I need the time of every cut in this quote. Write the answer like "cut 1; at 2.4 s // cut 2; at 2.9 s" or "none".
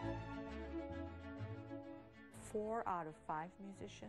none